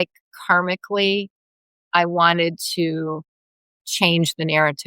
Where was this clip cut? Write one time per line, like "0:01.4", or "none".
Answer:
none